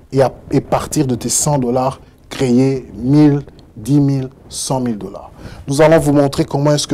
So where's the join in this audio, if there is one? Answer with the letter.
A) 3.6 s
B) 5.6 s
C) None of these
C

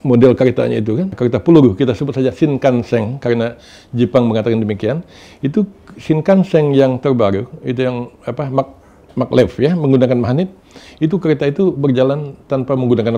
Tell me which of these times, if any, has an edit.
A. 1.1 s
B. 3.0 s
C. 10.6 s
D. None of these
A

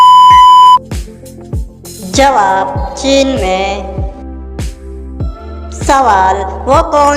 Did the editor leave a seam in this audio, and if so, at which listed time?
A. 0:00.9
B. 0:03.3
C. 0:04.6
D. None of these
A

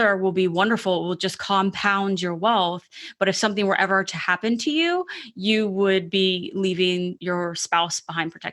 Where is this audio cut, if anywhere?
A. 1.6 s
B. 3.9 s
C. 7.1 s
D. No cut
C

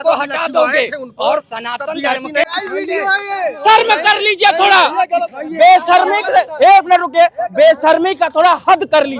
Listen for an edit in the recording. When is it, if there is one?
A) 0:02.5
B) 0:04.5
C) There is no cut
A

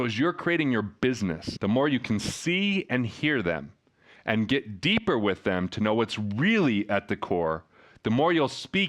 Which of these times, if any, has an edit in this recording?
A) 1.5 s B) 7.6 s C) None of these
A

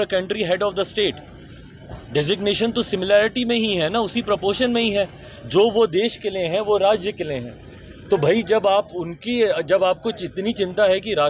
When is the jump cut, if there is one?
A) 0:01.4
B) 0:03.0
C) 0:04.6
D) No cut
D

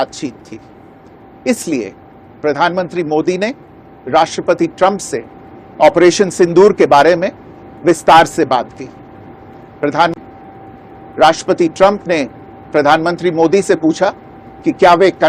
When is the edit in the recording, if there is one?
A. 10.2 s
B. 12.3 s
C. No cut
A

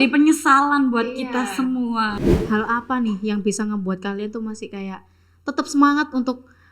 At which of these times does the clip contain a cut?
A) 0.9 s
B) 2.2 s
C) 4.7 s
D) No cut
B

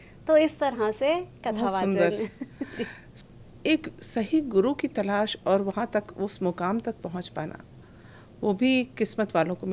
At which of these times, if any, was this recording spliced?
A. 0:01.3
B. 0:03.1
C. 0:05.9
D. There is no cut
B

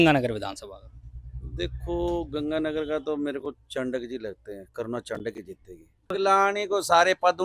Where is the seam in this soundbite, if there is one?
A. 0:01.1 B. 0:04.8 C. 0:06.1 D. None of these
C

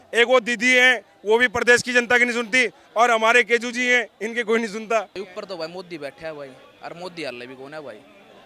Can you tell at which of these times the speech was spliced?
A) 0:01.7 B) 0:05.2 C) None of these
B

